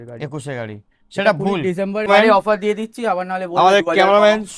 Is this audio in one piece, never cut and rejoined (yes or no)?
no